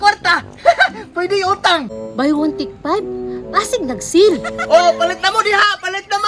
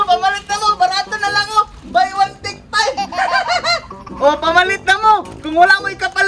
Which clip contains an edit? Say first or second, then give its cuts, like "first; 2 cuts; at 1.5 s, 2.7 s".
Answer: first; 1 cut; at 2.0 s